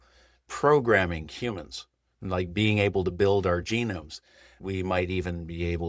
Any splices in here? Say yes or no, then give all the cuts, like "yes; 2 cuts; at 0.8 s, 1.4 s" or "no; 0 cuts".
yes; 1 cut; at 4.6 s